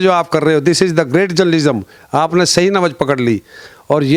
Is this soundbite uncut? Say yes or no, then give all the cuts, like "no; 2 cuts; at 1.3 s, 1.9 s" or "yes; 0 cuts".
yes; 0 cuts